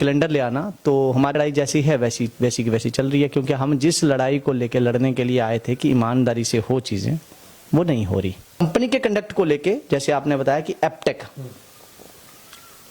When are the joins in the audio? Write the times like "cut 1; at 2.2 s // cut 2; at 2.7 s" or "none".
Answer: cut 1; at 1.4 s // cut 2; at 8.6 s